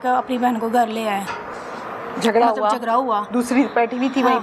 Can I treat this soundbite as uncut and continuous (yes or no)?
yes